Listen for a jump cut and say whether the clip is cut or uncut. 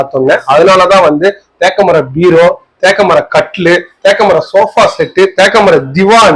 uncut